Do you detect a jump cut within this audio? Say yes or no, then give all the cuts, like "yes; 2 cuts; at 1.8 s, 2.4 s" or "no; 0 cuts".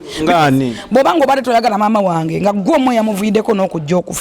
no; 0 cuts